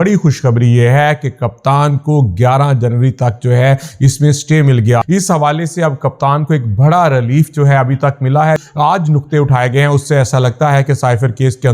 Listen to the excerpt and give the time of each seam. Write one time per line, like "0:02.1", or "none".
0:05.0
0:08.6